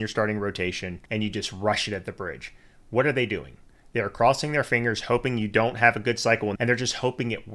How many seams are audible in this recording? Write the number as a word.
two